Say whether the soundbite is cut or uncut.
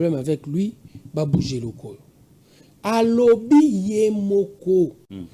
uncut